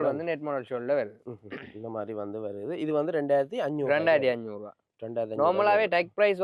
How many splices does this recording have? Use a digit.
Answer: 0